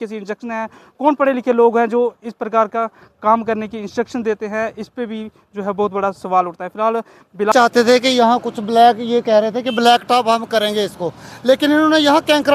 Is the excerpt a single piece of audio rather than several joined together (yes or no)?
no